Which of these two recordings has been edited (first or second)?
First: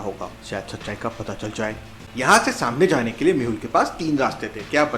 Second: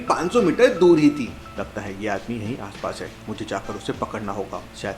first